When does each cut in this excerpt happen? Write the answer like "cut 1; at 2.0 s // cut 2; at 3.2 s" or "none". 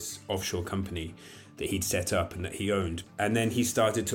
cut 1; at 3.0 s